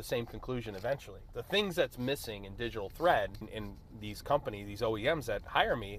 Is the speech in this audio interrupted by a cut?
yes; 1 cut; at 3.5 s

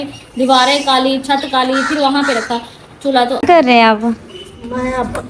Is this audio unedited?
no; 1 cut; at 3.4 s

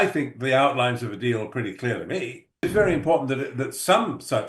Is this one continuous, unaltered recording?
no; 1 cut; at 2.6 s

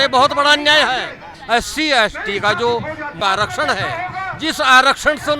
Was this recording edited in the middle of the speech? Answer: yes; 2 cuts; at 1.3 s, 3.2 s

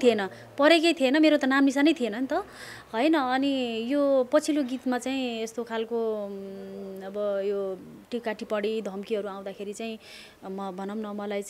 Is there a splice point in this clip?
no; 0 cuts

